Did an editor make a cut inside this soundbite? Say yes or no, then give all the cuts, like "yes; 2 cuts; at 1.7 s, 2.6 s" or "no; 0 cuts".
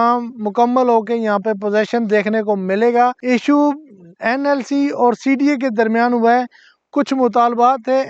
yes; 1 cut; at 3.2 s